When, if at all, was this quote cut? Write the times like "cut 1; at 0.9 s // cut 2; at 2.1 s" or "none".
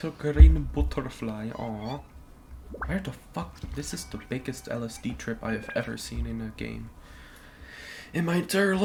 none